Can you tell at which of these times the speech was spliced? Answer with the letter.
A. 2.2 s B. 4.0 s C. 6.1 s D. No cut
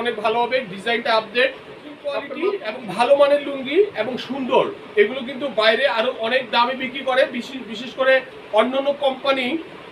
A